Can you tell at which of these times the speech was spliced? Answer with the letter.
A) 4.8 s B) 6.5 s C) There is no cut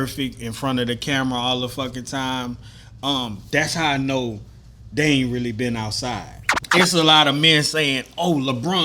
B